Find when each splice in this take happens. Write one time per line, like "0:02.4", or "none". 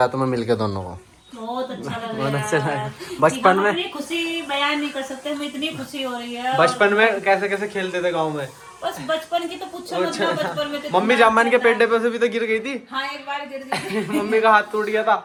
none